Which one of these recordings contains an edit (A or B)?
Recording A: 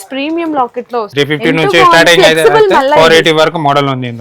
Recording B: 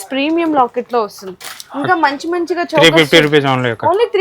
A